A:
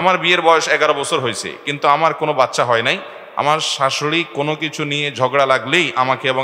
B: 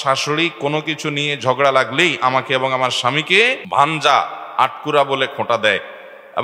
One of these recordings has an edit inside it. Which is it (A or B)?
B